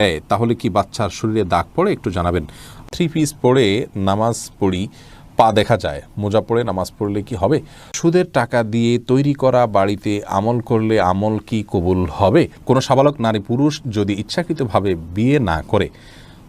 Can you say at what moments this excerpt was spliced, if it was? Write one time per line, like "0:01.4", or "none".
0:02.8
0:07.9
0:12.6